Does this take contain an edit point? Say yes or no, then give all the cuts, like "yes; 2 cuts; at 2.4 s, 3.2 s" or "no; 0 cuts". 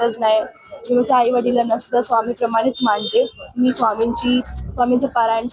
no; 0 cuts